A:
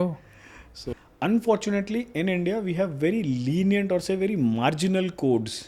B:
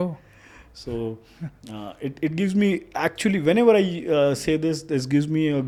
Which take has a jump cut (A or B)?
A